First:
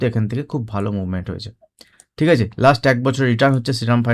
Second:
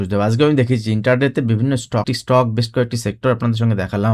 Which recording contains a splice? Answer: second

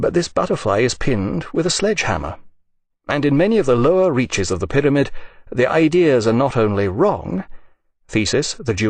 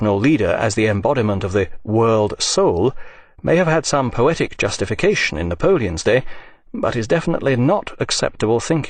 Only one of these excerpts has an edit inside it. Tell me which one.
second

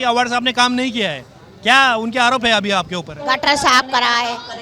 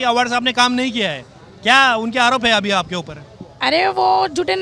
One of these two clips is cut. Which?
first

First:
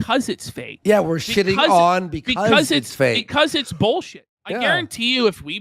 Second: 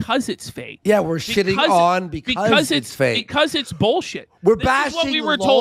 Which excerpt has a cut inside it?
first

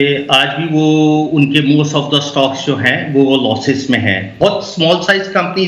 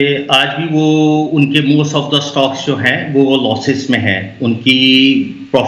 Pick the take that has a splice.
first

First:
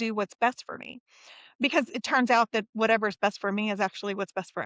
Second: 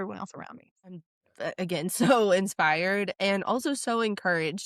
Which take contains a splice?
second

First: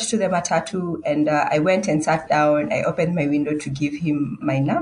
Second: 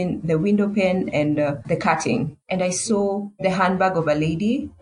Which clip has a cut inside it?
second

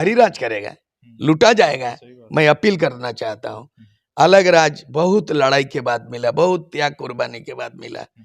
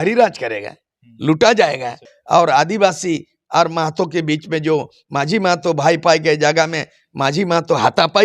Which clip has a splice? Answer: second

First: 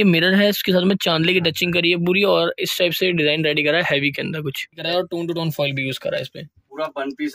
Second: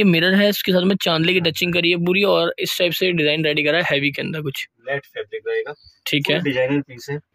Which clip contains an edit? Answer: first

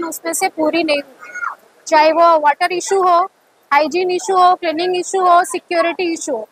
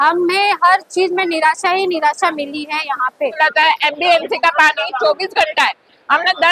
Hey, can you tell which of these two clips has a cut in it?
second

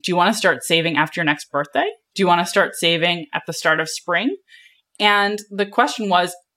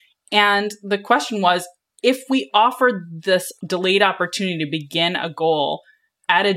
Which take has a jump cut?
second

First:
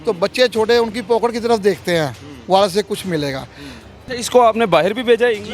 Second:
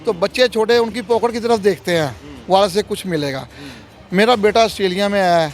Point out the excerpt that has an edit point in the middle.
first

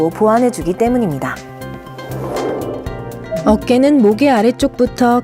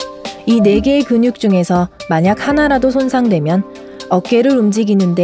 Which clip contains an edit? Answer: first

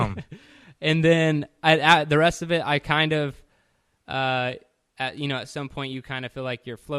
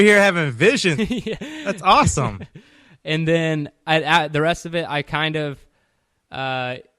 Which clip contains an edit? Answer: second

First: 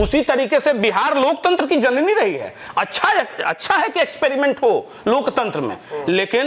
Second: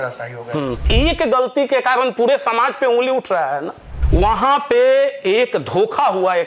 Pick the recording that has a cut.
second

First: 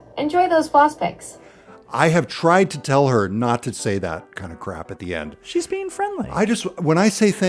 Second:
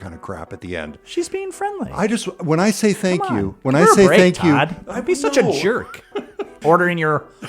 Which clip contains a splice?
second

